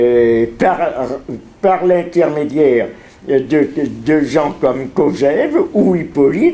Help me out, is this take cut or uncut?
uncut